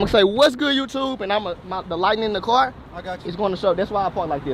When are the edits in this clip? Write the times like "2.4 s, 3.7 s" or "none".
none